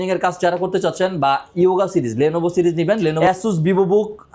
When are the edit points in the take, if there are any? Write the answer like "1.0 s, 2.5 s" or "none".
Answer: 3.2 s